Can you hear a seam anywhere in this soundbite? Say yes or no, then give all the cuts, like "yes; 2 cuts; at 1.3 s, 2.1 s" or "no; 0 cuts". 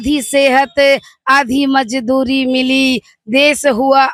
no; 0 cuts